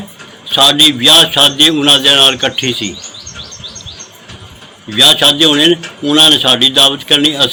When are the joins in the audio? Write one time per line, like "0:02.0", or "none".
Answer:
none